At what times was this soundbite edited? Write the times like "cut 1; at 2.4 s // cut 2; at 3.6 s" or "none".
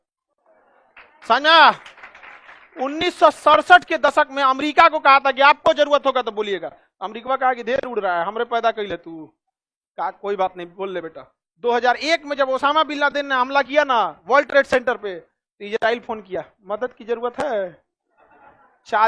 none